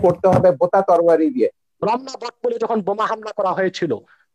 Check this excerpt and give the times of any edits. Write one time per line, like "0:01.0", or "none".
0:01.6